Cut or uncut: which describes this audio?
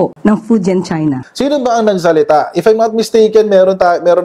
cut